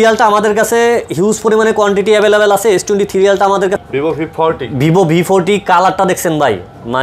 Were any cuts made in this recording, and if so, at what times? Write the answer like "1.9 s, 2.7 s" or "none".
3.8 s